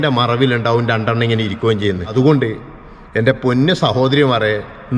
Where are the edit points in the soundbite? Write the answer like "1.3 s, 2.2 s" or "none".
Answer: 2.1 s